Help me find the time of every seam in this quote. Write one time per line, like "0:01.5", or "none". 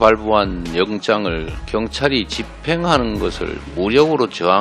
0:01.6